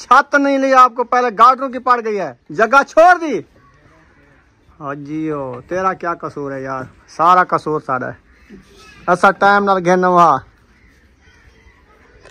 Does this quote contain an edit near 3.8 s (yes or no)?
no